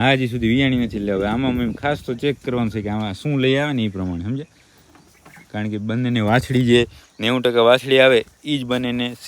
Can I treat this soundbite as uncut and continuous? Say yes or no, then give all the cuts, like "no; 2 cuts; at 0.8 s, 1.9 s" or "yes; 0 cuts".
yes; 0 cuts